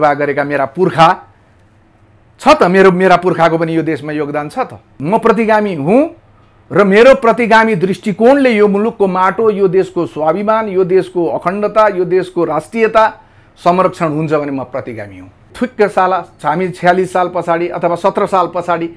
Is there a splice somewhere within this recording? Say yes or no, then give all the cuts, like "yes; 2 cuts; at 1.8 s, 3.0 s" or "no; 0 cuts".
yes; 2 cuts; at 5.0 s, 15.5 s